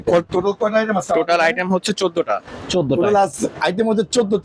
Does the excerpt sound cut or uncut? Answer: uncut